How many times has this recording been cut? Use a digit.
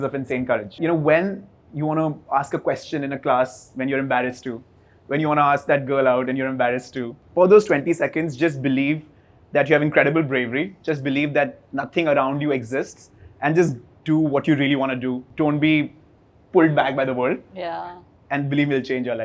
3